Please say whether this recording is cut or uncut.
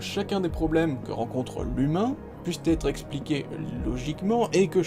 uncut